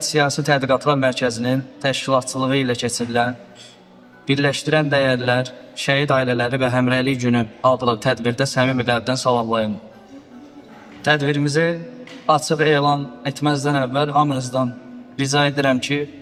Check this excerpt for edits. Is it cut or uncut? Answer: uncut